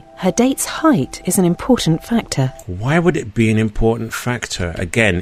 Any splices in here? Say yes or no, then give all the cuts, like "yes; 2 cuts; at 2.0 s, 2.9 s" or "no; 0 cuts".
no; 0 cuts